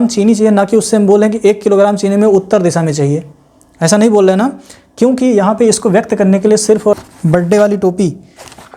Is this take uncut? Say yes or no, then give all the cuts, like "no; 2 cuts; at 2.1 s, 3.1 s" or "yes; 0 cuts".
no; 1 cut; at 7.0 s